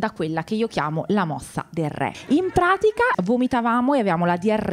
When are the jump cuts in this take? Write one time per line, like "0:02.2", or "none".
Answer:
0:02.2
0:03.2